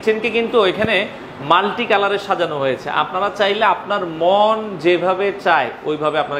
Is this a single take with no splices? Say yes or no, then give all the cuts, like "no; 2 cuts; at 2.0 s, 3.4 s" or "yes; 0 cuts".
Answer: yes; 0 cuts